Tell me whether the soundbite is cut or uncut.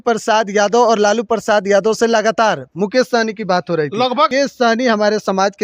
cut